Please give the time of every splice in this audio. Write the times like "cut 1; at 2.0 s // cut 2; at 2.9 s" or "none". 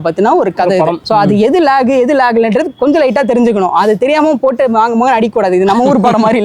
cut 1; at 1.0 s